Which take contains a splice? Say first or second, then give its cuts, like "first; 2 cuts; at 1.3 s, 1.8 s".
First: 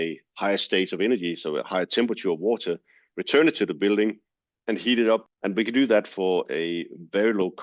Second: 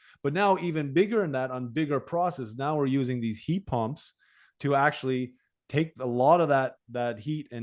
first; 1 cut; at 5.3 s